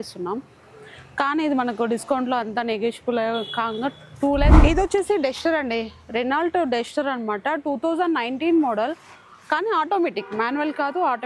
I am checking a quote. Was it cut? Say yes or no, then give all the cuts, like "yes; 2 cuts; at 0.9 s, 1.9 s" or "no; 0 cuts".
yes; 1 cut; at 4.5 s